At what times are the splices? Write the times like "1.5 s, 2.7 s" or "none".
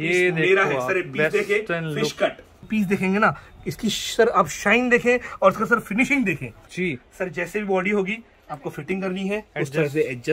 2.5 s, 6.6 s